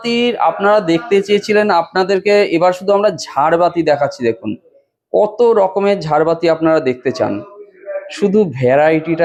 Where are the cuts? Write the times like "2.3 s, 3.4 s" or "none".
none

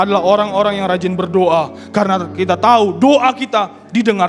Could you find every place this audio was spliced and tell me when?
none

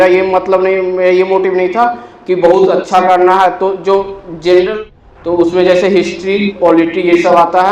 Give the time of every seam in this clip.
4.9 s

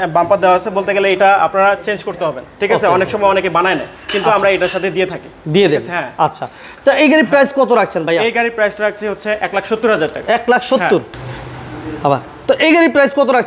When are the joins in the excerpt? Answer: none

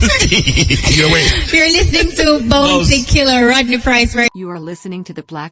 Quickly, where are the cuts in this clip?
4.3 s

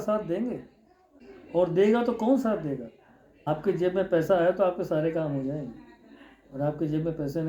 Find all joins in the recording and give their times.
none

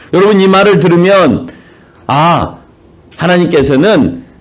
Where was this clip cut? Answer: none

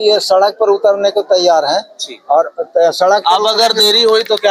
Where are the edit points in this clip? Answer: none

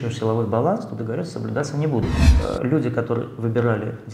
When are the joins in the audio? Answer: 2.3 s

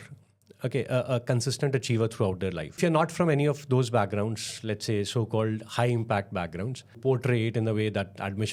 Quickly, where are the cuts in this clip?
2.8 s, 6.9 s

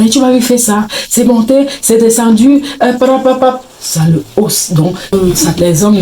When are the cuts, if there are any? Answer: 5.1 s

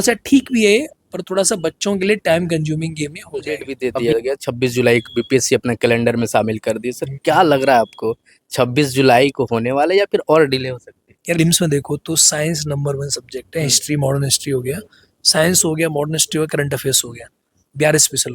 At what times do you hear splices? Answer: 3.7 s, 11.4 s

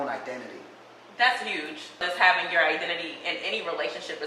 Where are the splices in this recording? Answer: 2.0 s

